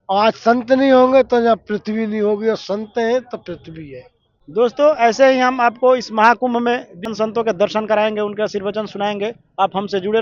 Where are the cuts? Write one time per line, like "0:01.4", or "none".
none